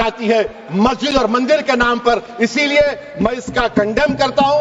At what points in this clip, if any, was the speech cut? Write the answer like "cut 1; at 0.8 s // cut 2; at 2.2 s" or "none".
none